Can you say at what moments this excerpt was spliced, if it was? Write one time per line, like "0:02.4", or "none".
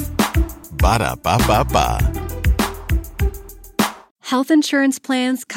0:04.1